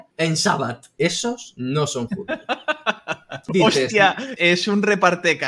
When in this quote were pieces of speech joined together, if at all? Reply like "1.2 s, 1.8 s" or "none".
0.9 s, 3.4 s, 4.3 s